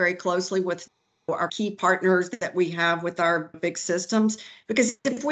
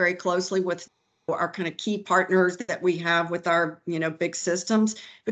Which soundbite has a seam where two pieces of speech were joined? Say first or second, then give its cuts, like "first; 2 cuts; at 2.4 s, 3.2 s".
first; 2 cuts; at 1.5 s, 3.5 s